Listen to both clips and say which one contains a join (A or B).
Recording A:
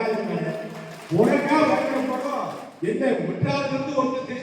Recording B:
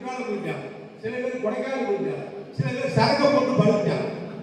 A